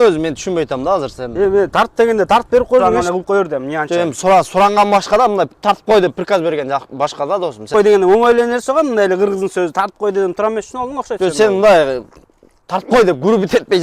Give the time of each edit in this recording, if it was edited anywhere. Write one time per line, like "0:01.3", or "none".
0:02.8
0:07.7